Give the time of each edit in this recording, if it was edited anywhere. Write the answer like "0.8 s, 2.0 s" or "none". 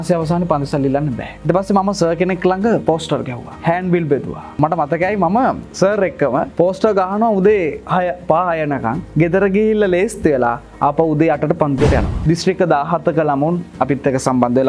12.2 s